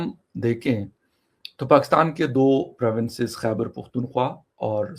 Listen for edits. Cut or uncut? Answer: uncut